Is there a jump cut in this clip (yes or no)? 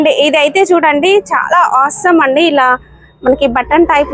no